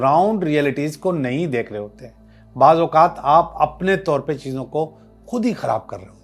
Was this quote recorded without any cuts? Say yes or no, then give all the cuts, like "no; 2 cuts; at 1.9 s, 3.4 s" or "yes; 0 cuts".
yes; 0 cuts